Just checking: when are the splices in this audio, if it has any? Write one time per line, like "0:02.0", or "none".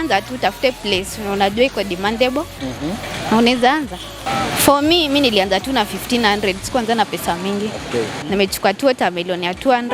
0:04.1

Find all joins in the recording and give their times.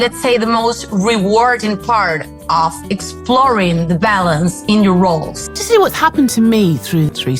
none

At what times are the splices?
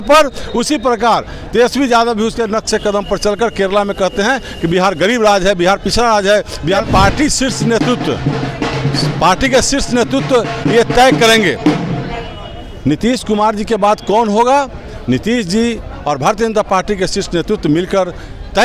0:06.9

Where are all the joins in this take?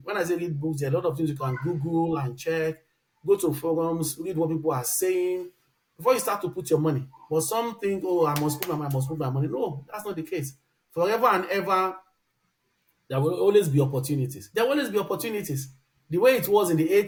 none

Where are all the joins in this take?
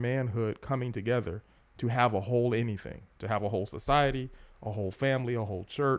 none

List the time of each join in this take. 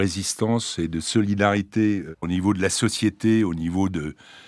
0:02.1

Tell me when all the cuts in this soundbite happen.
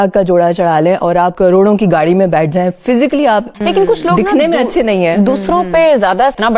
none

